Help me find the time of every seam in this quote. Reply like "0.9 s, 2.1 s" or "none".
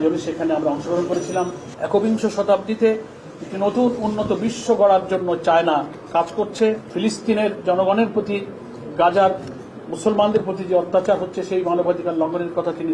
1.7 s, 6.9 s